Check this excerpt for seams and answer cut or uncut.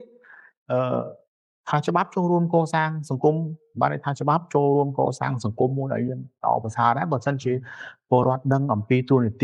uncut